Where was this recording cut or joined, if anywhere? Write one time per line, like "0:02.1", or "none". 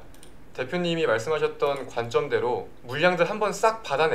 0:02.8